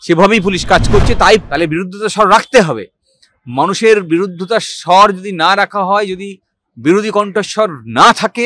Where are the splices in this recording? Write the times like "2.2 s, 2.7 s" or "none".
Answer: 1.4 s